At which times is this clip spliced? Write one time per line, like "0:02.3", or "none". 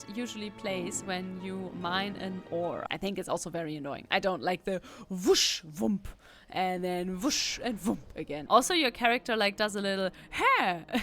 0:02.9
0:08.4